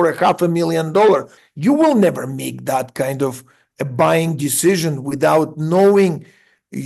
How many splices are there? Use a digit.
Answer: 1